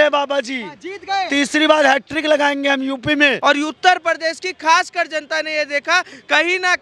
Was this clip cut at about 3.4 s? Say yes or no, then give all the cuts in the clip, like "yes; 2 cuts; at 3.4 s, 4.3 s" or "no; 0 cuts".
yes; 1 cut; at 3.4 s